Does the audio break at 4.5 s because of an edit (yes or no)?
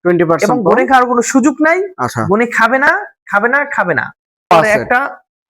yes